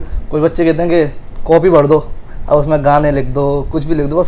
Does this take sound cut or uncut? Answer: uncut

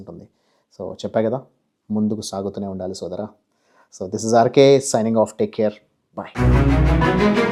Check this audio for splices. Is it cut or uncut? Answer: uncut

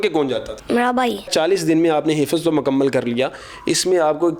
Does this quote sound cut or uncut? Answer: uncut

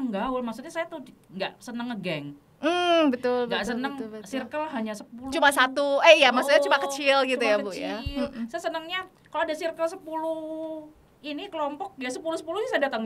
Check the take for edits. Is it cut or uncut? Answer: uncut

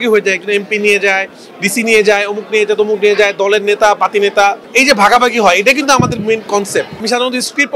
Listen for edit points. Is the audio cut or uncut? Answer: cut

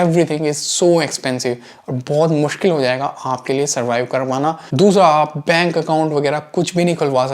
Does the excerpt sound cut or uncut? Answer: cut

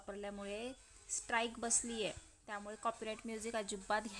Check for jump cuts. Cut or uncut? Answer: uncut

